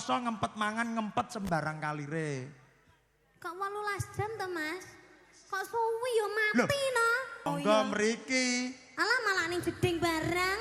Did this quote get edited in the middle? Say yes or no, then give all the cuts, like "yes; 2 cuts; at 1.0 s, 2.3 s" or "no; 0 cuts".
yes; 1 cut; at 7.5 s